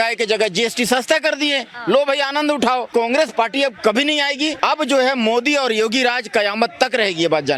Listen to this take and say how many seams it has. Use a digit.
2